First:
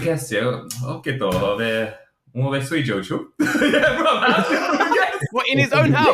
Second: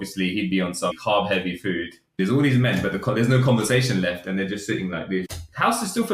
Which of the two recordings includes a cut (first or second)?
second